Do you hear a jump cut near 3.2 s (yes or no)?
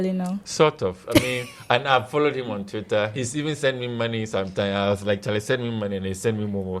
yes